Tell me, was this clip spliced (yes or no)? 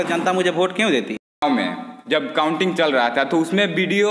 yes